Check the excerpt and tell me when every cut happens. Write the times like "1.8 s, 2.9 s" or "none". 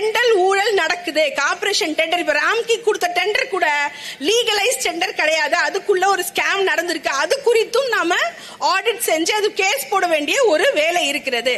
none

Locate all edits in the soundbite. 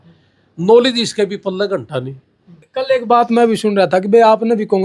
2.7 s

